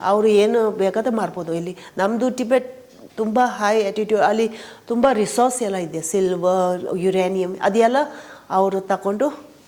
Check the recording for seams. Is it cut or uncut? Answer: uncut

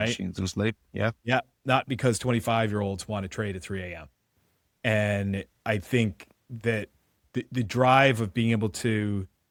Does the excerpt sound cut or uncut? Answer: uncut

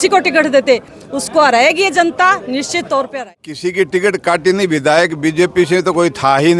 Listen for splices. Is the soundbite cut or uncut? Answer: cut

